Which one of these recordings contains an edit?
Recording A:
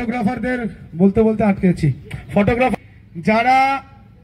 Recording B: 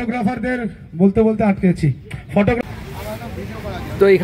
B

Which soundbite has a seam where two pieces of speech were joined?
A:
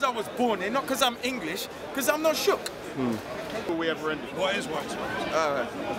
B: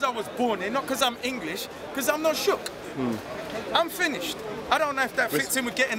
A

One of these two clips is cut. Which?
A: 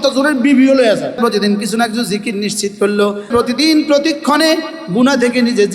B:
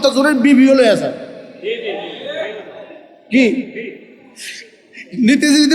A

